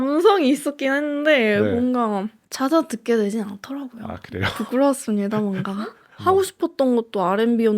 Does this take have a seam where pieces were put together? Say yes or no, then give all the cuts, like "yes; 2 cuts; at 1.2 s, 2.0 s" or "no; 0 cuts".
yes; 2 cuts; at 2.4 s, 6.1 s